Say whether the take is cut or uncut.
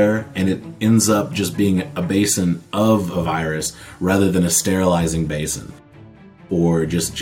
cut